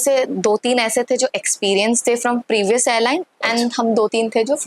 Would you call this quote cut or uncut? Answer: uncut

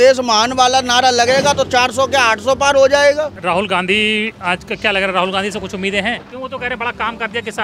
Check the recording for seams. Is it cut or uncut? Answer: cut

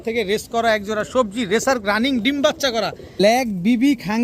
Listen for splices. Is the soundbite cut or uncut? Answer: cut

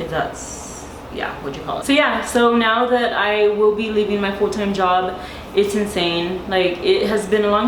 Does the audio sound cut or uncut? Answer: cut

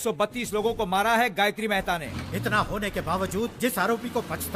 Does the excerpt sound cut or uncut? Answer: cut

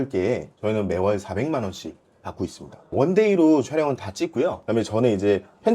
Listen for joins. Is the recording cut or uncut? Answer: cut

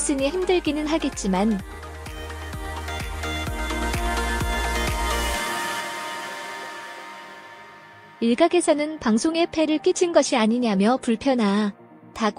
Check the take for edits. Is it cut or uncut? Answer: uncut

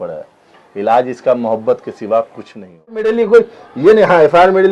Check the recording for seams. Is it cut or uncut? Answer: cut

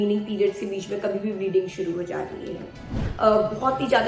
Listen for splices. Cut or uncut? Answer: cut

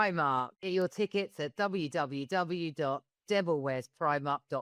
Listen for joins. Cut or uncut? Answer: uncut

